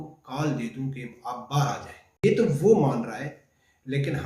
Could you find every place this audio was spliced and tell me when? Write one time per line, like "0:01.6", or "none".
0:02.2